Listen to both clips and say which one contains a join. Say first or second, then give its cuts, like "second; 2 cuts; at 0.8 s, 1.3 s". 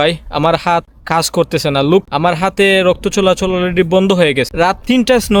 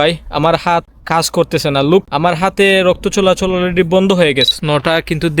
second; 1 cut; at 4.5 s